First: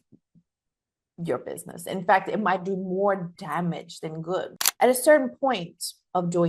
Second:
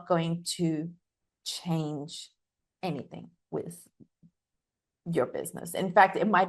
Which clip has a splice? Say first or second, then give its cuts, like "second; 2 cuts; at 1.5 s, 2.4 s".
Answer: first; 1 cut; at 4.5 s